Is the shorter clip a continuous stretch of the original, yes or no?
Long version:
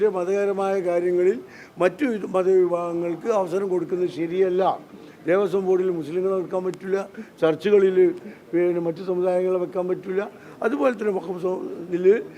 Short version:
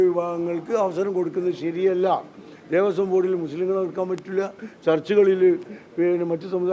yes